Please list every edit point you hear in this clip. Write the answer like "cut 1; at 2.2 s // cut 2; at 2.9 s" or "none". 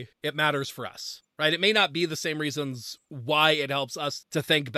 none